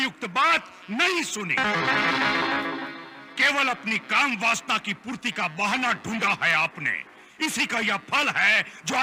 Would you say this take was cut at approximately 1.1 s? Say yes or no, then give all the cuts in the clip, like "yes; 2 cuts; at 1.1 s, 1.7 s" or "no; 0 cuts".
no; 0 cuts